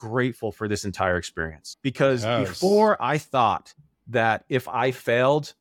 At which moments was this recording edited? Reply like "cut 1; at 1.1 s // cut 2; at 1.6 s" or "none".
cut 1; at 1.7 s